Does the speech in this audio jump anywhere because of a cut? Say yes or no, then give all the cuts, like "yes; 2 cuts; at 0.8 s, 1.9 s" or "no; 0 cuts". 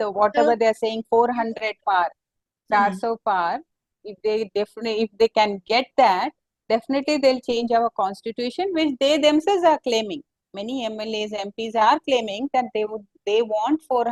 no; 0 cuts